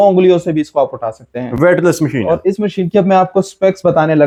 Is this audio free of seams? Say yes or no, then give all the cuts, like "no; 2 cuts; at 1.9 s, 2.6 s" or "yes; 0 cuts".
yes; 0 cuts